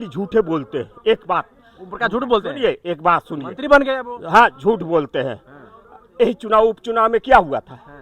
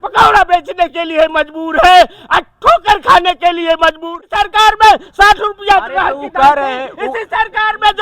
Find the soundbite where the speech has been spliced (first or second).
second